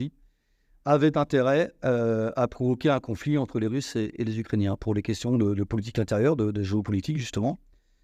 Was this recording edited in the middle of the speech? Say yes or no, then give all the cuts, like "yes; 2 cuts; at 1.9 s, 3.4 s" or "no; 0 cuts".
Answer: no; 0 cuts